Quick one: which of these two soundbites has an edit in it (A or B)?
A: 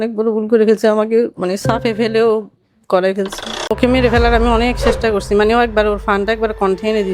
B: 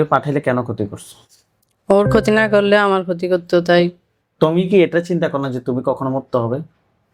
A